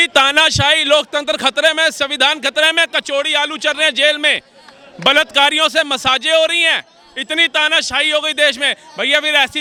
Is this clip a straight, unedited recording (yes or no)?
yes